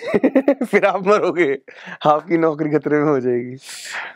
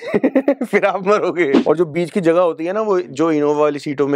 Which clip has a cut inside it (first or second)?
second